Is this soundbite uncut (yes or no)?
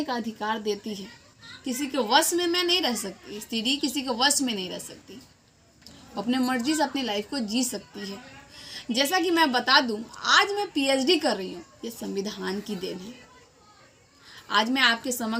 yes